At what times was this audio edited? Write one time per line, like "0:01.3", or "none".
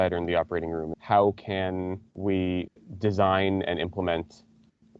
0:00.9
0:02.1